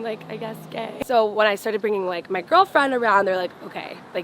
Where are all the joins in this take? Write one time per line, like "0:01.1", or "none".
0:00.9